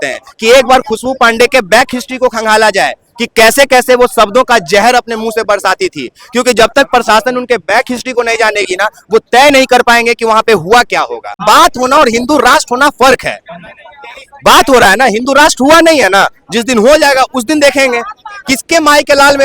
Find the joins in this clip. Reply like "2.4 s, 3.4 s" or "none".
11.4 s